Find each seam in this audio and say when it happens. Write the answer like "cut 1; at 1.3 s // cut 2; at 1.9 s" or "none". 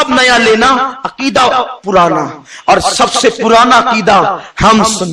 none